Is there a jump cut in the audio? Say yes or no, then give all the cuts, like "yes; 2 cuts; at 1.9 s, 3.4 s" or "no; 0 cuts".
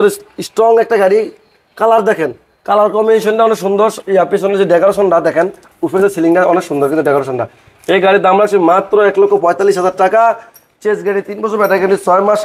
no; 0 cuts